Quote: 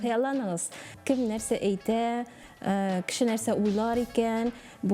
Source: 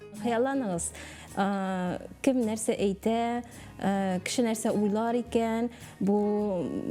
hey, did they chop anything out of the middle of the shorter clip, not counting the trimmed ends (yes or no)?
yes